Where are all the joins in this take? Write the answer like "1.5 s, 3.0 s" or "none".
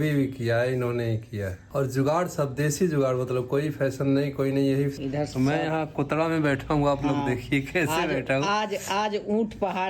1.6 s, 4.9 s